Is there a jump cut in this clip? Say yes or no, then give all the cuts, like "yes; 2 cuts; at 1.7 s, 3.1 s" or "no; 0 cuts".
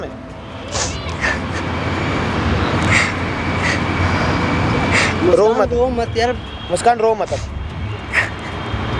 no; 0 cuts